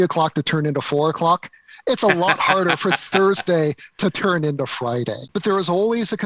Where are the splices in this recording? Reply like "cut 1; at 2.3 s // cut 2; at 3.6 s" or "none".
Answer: cut 1; at 5.2 s